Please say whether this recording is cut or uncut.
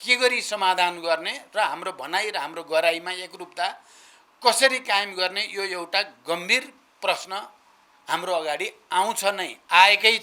uncut